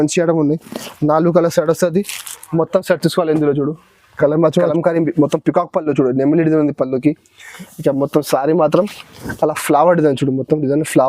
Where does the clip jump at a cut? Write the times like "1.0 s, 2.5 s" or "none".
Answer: 4.7 s